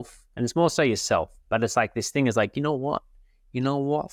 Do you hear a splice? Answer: no; 0 cuts

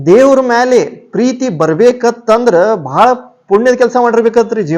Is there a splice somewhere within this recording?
no; 0 cuts

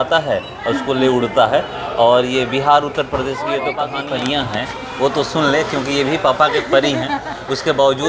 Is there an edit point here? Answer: yes; 1 cut; at 3.8 s

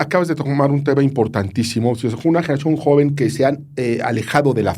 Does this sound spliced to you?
no; 0 cuts

